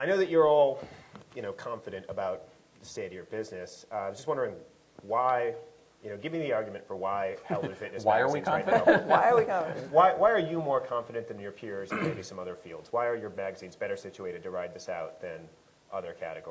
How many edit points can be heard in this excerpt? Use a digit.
0